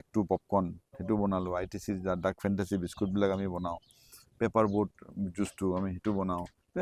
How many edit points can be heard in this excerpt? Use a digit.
0